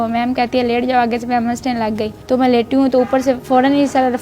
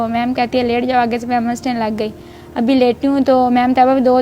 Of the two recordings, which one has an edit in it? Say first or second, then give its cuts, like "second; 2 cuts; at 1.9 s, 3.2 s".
first; 2 cuts; at 2.1 s, 3.4 s